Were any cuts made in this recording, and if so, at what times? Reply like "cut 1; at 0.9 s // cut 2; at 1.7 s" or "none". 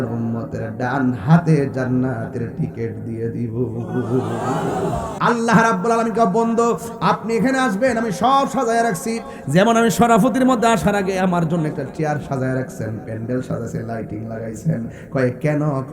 cut 1; at 5.1 s

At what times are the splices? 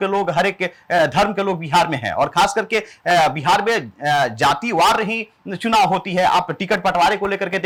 none

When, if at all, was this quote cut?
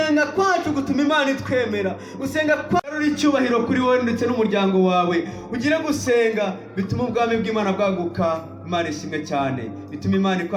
cut 1; at 2.8 s

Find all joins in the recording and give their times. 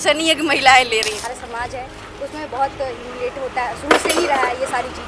cut 1; at 1.2 s

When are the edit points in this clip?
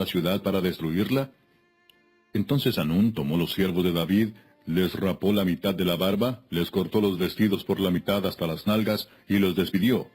cut 1; at 3.5 s

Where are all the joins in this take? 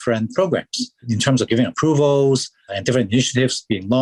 none

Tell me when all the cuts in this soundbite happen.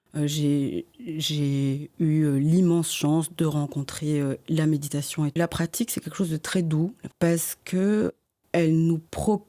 cut 1; at 5.4 s // cut 2; at 7.0 s

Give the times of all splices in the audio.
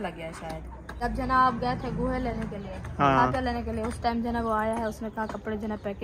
cut 1; at 1.1 s

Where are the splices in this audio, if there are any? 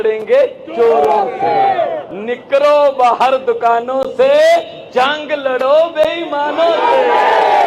none

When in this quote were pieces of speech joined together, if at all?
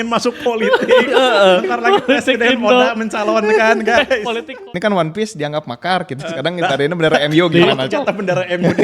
cut 1; at 4.5 s

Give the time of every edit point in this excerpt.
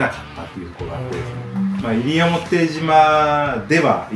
cut 1; at 1.8 s

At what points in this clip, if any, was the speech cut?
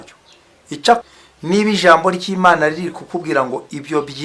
cut 1; at 1.0 s

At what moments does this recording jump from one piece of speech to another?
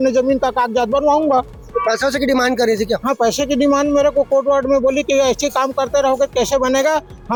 none

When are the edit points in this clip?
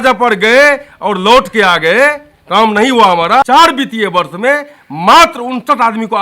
cut 1; at 3.4 s

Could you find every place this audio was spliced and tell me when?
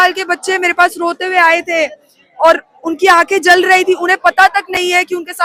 none

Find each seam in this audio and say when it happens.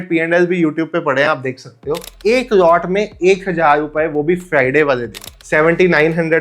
cut 1; at 2.1 s // cut 2; at 5.3 s

